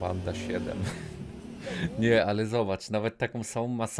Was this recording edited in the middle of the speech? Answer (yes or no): no